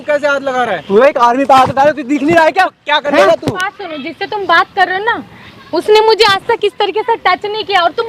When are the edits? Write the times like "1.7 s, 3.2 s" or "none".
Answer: 3.6 s